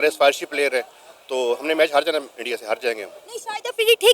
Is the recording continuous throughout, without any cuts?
yes; 0 cuts

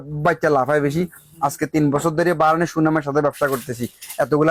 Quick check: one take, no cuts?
yes; 0 cuts

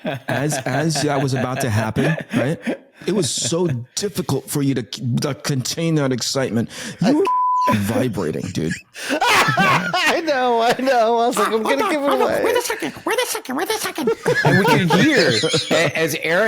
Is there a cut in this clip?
yes; 1 cut; at 2.9 s

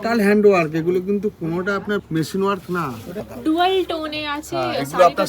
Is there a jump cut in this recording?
yes; 2 cuts; at 2.1 s, 3.2 s

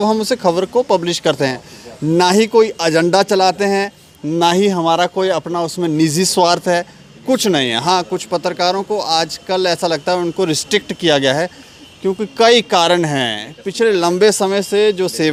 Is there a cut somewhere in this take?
no; 0 cuts

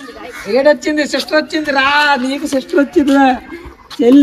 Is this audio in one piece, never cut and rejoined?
yes; 0 cuts

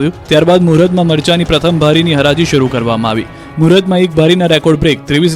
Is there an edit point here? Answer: yes; 1 cut; at 2.5 s

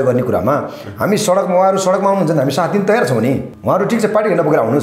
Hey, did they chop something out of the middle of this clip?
yes; 1 cut; at 3.5 s

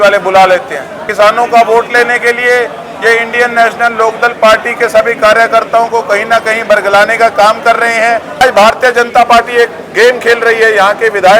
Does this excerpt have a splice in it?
yes; 2 cuts; at 1.1 s, 8.4 s

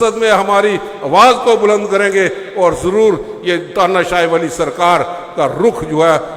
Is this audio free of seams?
yes; 0 cuts

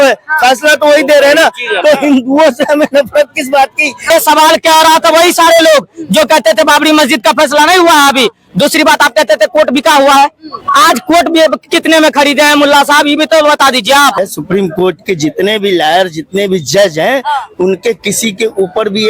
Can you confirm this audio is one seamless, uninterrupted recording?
no; 2 cuts; at 4.1 s, 14.2 s

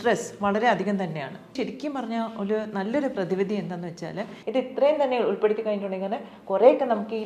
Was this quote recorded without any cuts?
no; 2 cuts; at 1.5 s, 4.3 s

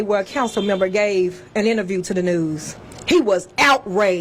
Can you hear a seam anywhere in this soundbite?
no; 0 cuts

